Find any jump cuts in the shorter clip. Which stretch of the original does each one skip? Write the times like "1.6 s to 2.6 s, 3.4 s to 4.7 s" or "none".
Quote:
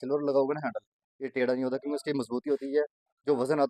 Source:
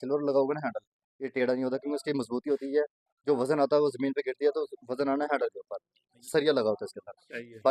none